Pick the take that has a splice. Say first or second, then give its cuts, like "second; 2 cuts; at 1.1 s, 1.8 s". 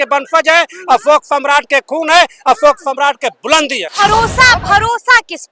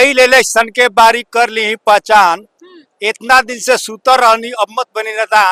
first; 1 cut; at 3.9 s